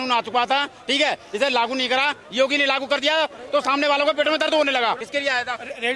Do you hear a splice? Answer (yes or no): yes